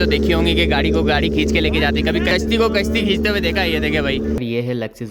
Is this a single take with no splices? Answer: no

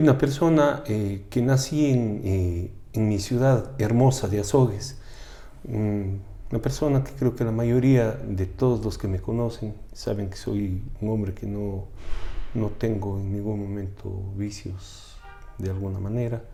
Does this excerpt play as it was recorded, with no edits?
yes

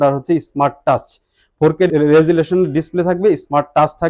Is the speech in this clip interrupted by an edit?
yes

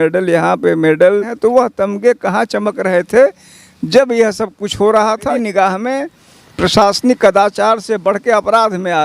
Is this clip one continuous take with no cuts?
no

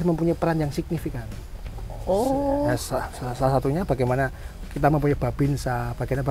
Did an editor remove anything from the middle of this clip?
no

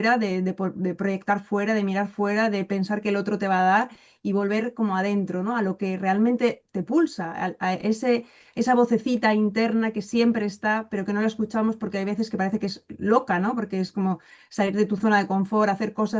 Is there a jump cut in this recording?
no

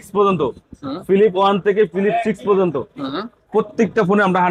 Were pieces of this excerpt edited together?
no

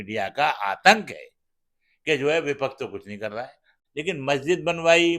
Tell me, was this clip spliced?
yes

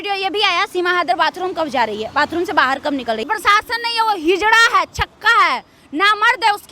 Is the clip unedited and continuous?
no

